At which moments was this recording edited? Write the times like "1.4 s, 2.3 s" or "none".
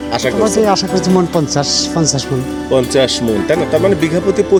none